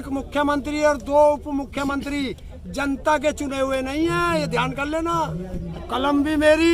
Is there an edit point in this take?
yes; 1 cut; at 5.7 s

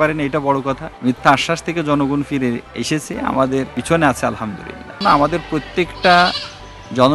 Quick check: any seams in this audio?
yes; 4 cuts; at 0.9 s, 2.7 s, 3.8 s, 5.0 s

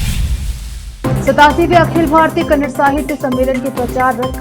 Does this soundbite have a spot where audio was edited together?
yes; 1 cut; at 0.9 s

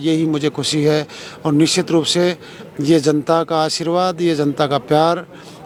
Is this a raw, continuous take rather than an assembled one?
yes; 0 cuts

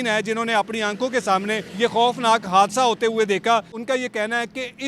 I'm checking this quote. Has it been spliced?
yes; 2 cuts; at 1.7 s, 3.8 s

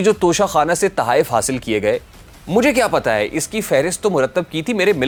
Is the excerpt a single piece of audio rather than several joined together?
yes; 0 cuts

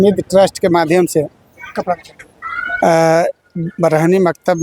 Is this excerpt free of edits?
yes; 0 cuts

